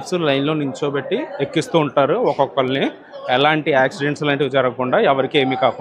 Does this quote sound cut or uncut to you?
uncut